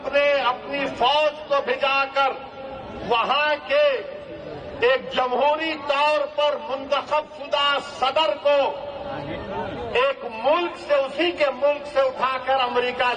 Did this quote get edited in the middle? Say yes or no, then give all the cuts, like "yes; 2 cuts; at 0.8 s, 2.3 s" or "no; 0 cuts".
no; 0 cuts